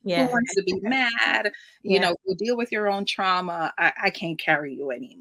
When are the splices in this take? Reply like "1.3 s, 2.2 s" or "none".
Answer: none